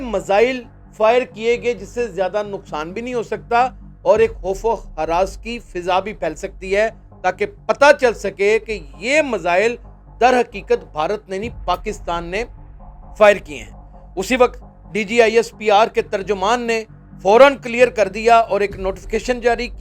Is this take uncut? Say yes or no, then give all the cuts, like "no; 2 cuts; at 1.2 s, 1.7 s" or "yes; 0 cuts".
yes; 0 cuts